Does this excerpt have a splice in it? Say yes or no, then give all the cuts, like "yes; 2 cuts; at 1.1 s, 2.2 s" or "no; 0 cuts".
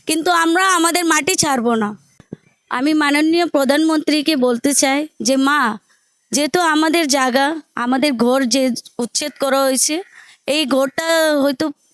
yes; 1 cut; at 2.1 s